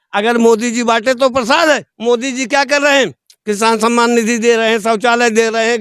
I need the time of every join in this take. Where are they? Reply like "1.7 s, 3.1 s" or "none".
none